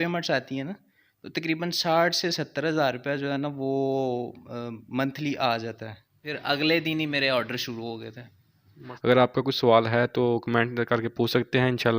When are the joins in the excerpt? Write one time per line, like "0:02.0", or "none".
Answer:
0:06.3
0:08.8